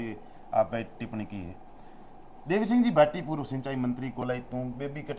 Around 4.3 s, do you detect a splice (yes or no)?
no